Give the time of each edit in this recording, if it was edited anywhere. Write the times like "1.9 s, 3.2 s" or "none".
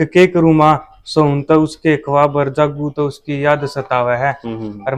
none